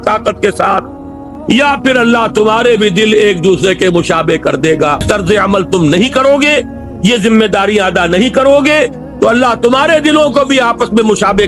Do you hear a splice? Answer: yes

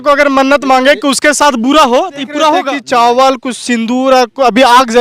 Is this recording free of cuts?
no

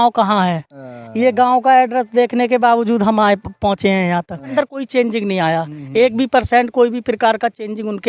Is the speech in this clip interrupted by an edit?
yes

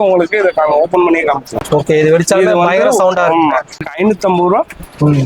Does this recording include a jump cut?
yes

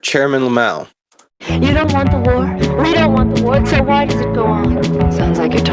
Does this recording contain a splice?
yes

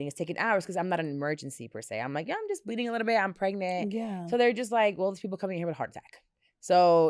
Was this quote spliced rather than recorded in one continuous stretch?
no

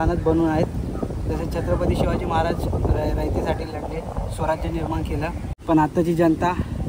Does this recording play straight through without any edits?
no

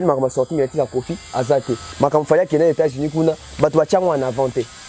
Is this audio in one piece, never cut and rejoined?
no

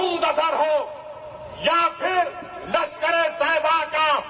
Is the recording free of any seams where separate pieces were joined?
yes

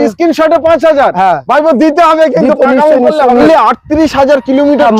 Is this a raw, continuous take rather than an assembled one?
no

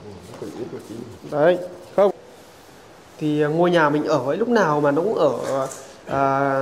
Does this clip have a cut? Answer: yes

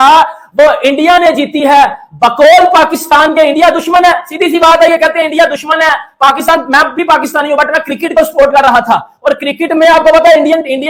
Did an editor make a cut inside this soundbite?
no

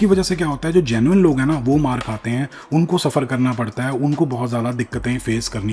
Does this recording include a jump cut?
no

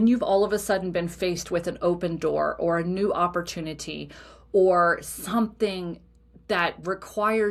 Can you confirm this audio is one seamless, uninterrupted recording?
yes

